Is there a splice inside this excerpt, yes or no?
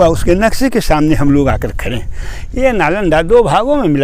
no